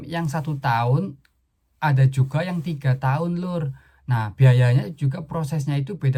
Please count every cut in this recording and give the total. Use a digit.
0